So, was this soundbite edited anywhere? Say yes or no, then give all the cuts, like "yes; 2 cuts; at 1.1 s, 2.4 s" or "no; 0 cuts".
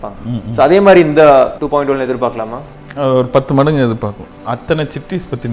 yes; 2 cuts; at 1.6 s, 4.3 s